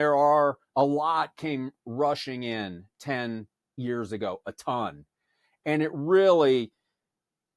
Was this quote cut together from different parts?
yes; 1 cut; at 3.8 s

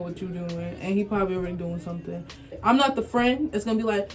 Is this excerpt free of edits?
no; 1 cut; at 2.6 s

